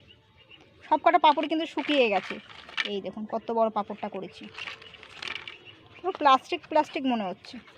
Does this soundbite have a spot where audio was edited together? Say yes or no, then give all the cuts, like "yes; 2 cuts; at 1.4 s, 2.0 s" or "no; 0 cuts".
no; 0 cuts